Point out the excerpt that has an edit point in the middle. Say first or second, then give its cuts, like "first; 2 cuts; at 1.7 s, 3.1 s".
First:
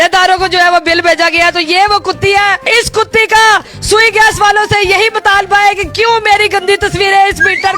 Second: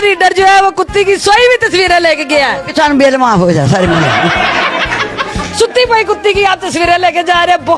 second; 1 cut; at 5.4 s